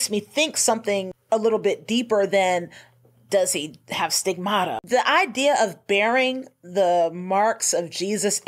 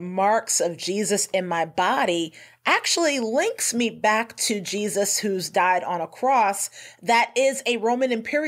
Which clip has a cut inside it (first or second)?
first